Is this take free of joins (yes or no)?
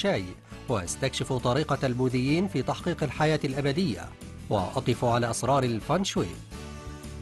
no